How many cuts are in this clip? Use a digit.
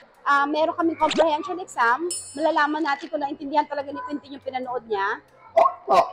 0